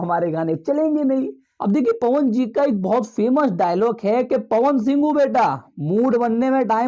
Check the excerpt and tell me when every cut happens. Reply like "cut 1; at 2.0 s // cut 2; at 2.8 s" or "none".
cut 1; at 1.4 s